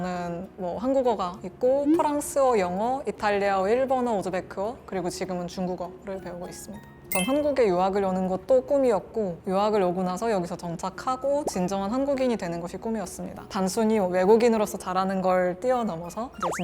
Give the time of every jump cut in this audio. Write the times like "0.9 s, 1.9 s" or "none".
6.9 s, 13.5 s